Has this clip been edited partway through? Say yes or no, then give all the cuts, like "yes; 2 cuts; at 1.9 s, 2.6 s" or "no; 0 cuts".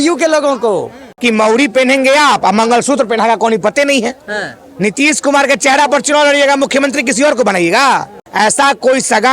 yes; 2 cuts; at 1.2 s, 8.2 s